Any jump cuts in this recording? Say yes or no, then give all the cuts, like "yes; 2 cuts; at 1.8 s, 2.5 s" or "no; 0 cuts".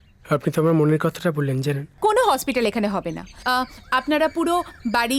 yes; 1 cut; at 1.9 s